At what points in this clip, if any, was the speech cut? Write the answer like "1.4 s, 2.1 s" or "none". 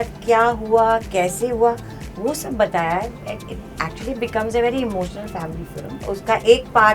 6.0 s